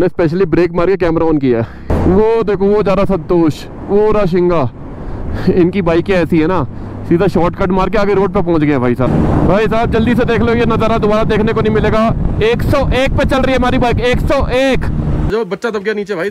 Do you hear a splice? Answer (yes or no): yes